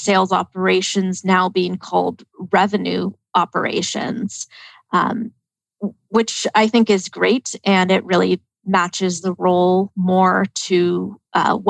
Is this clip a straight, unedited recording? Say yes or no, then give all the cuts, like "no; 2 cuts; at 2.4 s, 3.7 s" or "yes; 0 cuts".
yes; 0 cuts